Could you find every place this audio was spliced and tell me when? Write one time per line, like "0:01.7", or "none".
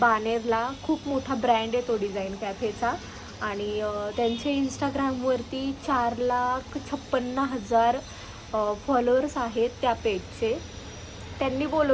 none